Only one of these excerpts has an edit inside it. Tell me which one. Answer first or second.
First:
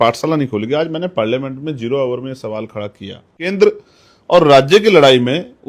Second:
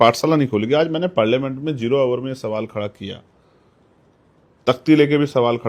first